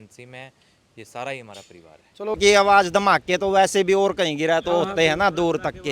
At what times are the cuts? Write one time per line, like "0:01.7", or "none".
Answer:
0:02.4